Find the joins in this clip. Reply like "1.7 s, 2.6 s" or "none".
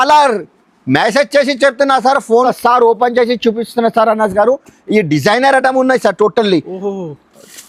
2.4 s